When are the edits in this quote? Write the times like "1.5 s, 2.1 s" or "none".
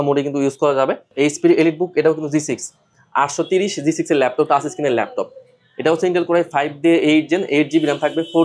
1.1 s